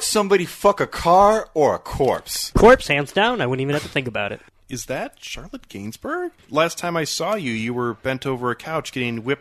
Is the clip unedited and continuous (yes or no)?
no